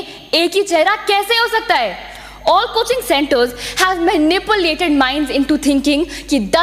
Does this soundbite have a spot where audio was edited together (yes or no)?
no